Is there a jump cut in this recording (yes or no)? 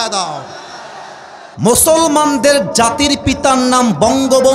yes